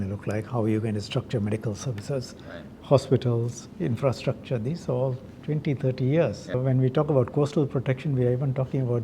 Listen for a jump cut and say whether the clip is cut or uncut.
cut